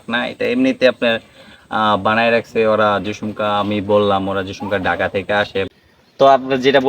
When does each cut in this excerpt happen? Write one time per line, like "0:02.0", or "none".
0:05.6